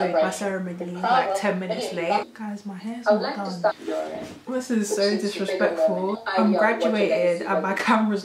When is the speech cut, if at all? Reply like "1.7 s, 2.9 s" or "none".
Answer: 2.3 s, 3.9 s, 6.2 s